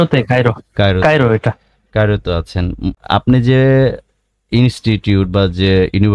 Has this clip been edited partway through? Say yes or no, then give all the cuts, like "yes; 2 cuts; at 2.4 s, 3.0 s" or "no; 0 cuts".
yes; 1 cut; at 2.9 s